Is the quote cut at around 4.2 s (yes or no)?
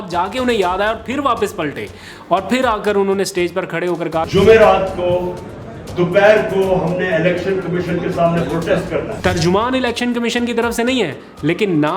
yes